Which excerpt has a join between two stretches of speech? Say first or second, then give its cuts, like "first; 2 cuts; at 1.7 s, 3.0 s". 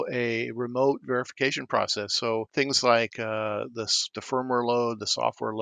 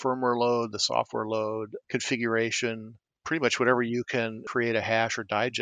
second; 1 cut; at 4.4 s